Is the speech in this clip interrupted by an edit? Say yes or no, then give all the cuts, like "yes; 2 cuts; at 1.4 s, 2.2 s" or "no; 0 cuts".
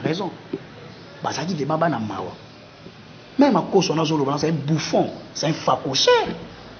no; 0 cuts